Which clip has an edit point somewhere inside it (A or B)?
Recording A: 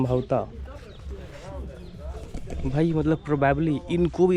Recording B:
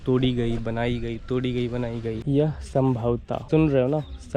B